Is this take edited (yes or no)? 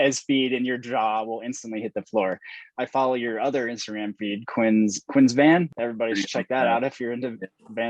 yes